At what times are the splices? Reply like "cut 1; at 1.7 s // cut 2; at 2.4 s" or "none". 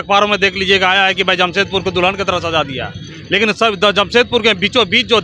none